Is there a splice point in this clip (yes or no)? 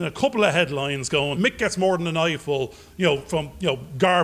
yes